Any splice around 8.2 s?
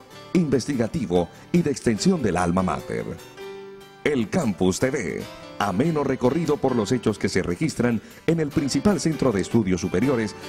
no; 0 cuts

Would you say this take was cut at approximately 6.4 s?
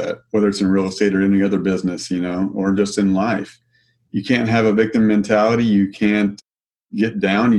yes; 1 cut; at 6.4 s

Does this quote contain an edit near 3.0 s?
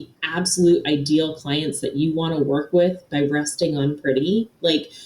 yes; 1 cut; at 3.0 s

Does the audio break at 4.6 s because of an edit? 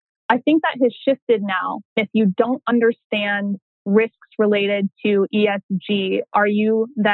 no; 1 cut; at 2.0 s

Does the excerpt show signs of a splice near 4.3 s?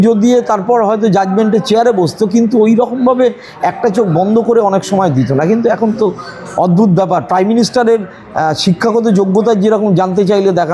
no; 0 cuts

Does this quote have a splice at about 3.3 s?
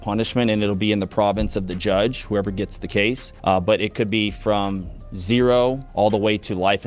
yes; 2 cuts; at 3.3 s, 5.8 s

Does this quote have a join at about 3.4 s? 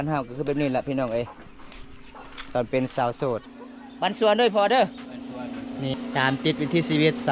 yes; 2 cuts; at 3.4 s, 5.9 s

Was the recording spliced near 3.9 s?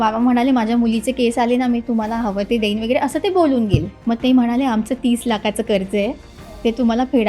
yes; 1 cut; at 3.9 s

